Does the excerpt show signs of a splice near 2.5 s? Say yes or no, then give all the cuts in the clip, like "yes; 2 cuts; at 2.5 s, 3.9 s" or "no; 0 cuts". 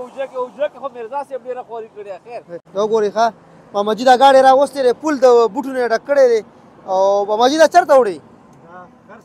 yes; 1 cut; at 2.5 s